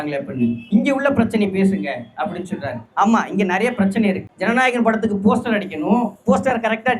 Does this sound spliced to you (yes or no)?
yes